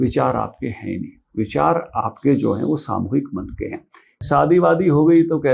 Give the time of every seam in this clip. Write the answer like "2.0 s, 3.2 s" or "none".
4.1 s